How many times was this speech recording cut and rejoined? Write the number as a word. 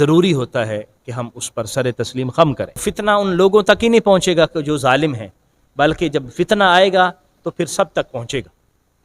one